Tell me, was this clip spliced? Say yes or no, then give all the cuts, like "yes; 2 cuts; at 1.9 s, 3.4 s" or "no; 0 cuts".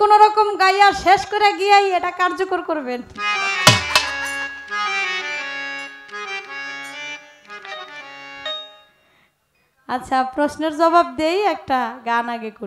no; 0 cuts